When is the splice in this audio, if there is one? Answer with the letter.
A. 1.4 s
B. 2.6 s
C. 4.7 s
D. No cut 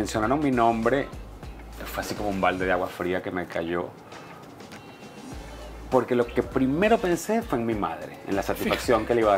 D